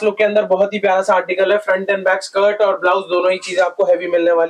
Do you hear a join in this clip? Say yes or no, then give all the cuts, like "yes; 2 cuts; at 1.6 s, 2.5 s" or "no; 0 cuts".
no; 0 cuts